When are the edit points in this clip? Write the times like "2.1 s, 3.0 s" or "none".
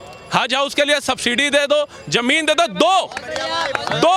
none